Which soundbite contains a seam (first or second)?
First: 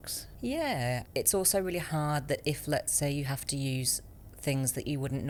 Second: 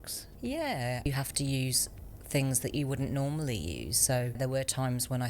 second